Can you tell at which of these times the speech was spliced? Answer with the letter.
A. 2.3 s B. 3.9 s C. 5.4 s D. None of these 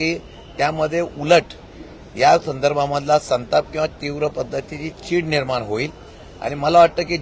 D